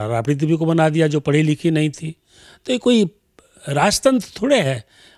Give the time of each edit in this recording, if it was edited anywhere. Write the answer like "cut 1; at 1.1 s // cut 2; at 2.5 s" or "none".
none